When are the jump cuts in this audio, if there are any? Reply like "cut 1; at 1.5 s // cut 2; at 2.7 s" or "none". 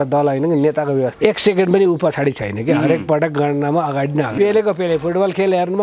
cut 1; at 1.1 s // cut 2; at 4.3 s